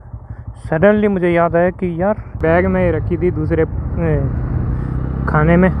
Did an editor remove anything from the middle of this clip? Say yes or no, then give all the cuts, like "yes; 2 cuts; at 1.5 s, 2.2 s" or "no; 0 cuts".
yes; 1 cut; at 2.4 s